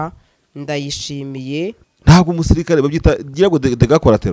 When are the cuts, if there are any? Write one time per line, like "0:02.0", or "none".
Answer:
0:01.9